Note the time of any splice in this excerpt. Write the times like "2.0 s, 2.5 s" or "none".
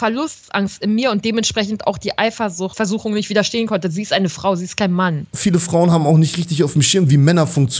2.7 s, 5.3 s